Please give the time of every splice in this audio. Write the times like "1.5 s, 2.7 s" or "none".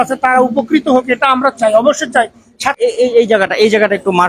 2.6 s